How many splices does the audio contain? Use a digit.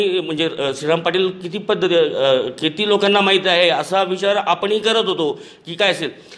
0